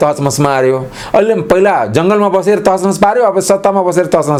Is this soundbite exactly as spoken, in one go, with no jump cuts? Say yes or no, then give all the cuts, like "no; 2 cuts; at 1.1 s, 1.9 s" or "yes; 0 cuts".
yes; 0 cuts